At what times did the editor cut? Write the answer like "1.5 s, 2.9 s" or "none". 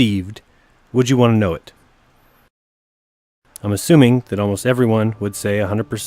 1.2 s